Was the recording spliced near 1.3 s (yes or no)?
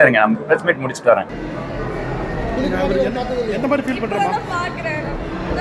yes